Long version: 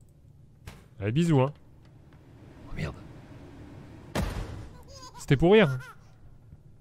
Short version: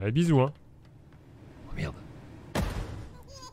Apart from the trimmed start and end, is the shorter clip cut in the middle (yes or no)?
yes